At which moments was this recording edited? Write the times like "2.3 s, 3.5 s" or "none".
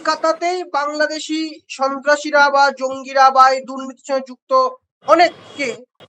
none